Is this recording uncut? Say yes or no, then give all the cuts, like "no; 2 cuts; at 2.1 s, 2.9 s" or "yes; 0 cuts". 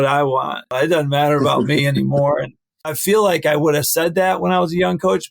no; 2 cuts; at 0.7 s, 2.9 s